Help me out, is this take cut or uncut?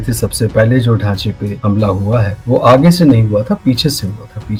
uncut